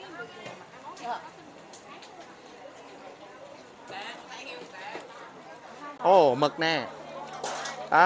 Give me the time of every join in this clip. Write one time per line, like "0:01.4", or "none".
0:06.0